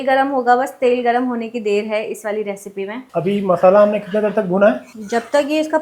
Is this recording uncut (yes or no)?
yes